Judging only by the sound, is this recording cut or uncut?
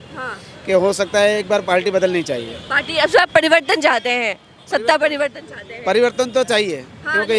uncut